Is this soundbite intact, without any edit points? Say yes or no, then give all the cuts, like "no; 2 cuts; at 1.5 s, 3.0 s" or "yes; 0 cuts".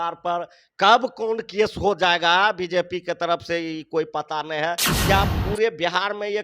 no; 1 cut; at 4.9 s